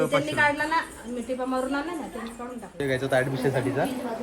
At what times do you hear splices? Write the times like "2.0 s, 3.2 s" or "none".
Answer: 2.8 s